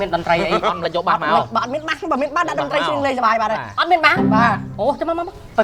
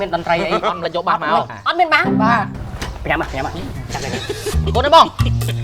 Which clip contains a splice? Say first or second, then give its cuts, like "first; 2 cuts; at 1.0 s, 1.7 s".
second; 2 cuts; at 1.5 s, 2.6 s